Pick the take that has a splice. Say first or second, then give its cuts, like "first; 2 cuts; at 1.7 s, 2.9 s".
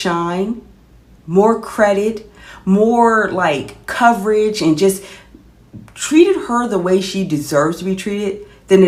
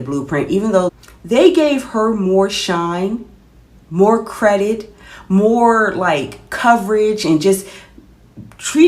second; 1 cut; at 0.9 s